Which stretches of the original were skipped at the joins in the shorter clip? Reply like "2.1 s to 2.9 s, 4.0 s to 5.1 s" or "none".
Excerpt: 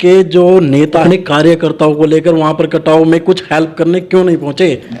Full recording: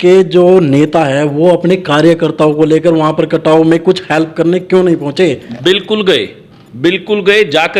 1.0 s to 1.6 s